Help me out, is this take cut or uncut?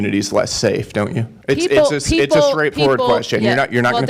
cut